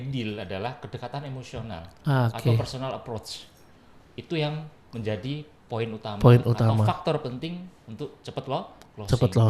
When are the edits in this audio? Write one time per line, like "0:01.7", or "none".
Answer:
none